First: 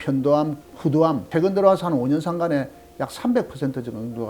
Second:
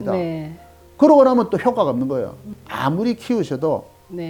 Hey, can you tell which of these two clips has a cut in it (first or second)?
first